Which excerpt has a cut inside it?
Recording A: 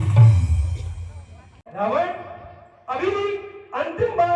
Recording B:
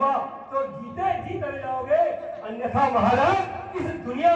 A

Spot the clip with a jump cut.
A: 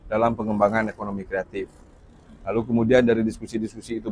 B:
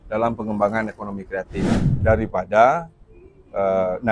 B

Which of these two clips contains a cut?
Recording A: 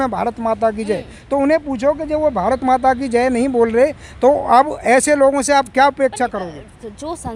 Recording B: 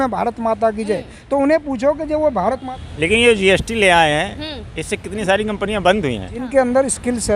B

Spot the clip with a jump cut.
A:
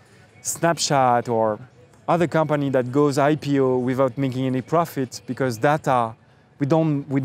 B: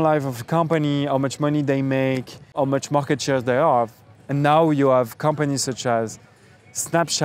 B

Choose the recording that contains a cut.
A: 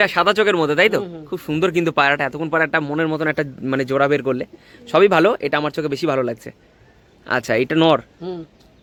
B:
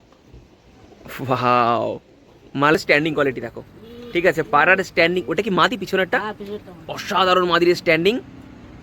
B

